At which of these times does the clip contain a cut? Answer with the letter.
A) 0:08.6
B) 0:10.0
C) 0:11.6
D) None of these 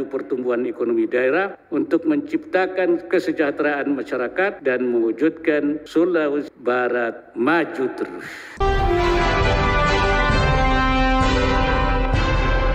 A